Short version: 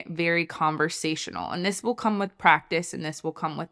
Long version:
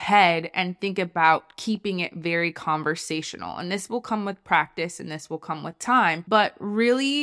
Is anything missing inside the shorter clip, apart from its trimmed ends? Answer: no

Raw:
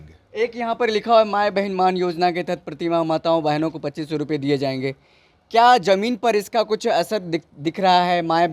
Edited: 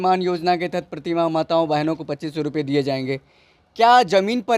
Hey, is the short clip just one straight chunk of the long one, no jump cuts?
yes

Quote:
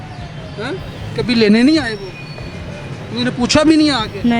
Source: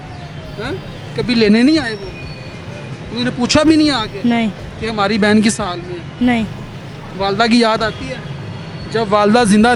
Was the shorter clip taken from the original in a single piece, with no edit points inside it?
yes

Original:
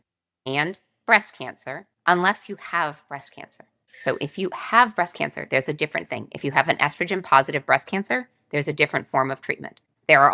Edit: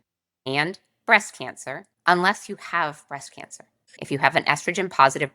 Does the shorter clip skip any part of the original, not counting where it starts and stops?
yes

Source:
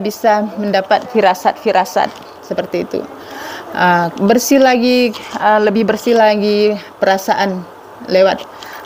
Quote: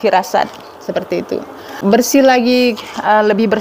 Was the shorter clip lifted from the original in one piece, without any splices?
no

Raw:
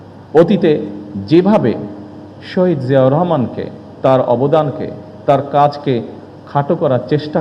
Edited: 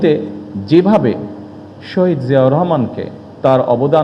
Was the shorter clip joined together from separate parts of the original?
no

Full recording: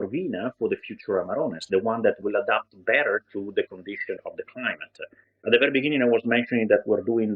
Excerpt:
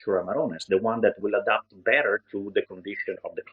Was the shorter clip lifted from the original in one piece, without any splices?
yes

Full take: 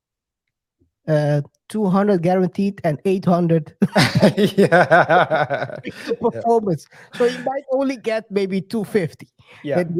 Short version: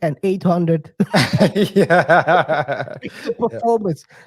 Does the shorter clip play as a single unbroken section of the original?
yes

